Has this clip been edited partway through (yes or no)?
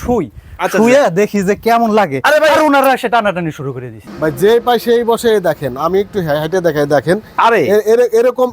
yes